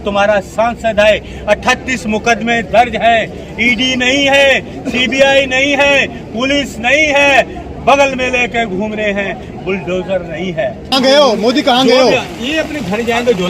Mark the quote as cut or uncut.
cut